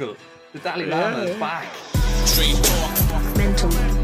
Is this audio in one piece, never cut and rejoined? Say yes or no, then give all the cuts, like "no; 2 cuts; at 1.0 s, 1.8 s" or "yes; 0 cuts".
no; 1 cut; at 1.7 s